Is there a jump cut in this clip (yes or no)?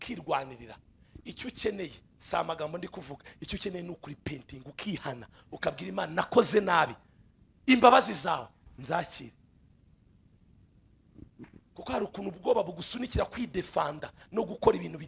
no